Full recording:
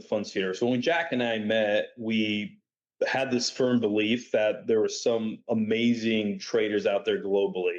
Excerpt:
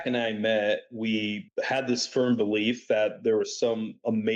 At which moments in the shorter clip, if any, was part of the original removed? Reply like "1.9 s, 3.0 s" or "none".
1.4 s